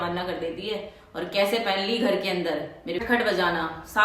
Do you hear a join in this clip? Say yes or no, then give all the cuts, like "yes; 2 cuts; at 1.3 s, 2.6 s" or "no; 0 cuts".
yes; 1 cut; at 3.0 s